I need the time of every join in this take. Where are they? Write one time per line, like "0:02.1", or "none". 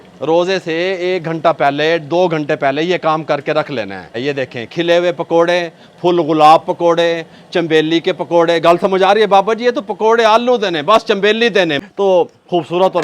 0:04.2
0:11.8